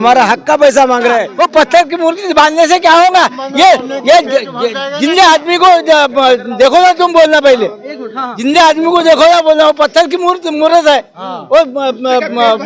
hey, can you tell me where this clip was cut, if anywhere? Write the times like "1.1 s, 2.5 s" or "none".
1.3 s